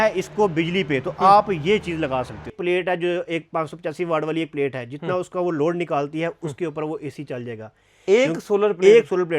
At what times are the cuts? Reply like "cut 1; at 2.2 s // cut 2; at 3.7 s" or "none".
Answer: cut 1; at 2.6 s